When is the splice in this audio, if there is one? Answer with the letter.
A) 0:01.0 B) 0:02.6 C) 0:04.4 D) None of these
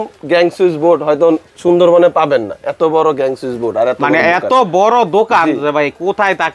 D